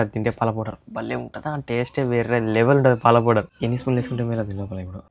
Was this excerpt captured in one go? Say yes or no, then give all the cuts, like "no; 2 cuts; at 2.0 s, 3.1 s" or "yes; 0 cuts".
no; 1 cut; at 3.5 s